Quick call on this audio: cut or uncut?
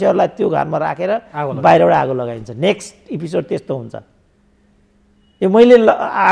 uncut